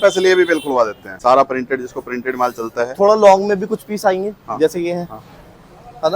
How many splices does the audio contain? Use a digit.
1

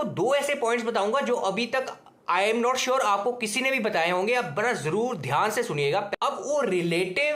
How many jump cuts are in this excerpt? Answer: 1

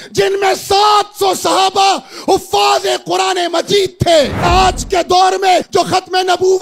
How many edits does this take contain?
2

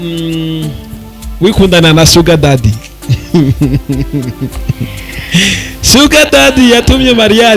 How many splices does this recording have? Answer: 0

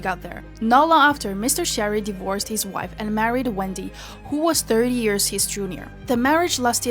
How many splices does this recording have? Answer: 1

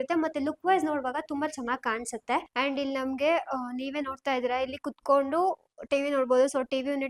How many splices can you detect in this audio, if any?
1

